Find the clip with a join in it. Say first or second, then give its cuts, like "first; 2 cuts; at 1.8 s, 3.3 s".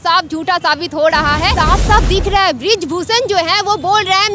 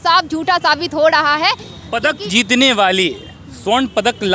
first; 1 cut; at 1.5 s